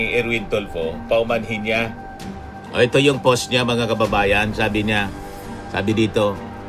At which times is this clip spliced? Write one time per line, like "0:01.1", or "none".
none